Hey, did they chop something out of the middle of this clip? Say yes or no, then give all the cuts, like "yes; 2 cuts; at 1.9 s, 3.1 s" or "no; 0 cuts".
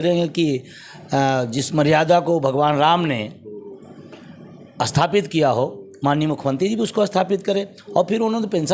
no; 0 cuts